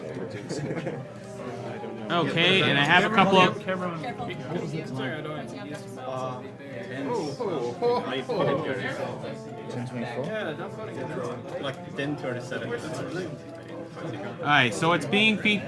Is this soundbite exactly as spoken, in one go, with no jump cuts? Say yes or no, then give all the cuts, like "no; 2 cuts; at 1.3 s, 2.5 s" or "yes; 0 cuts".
yes; 0 cuts